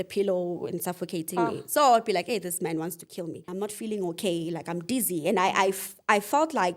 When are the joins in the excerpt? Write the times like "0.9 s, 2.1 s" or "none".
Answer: 3.5 s

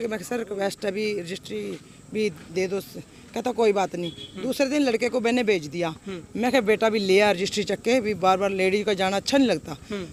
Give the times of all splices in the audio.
none

